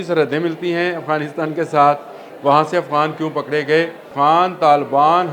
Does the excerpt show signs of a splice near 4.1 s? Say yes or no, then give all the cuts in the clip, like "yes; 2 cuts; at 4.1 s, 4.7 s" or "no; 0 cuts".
yes; 1 cut; at 4.1 s